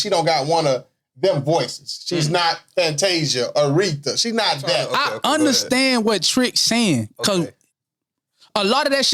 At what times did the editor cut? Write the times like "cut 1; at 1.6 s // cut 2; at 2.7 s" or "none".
cut 1; at 4.9 s